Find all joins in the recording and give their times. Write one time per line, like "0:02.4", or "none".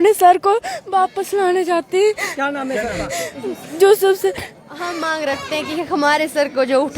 0:04.8